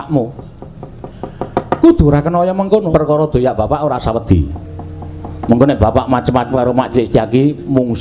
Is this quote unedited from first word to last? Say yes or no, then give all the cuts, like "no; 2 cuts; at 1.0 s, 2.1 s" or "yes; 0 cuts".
no; 1 cut; at 2.9 s